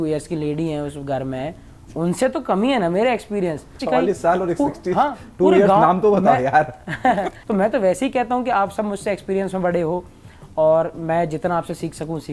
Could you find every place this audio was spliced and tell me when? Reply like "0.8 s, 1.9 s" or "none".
3.7 s, 7.3 s